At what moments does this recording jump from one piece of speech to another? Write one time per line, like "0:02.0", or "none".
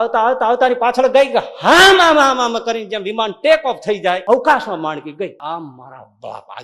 0:04.2
0:05.4